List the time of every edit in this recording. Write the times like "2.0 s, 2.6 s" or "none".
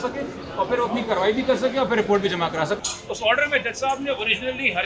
2.8 s